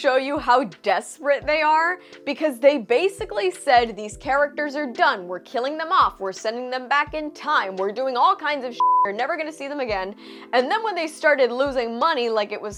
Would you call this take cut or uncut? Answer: uncut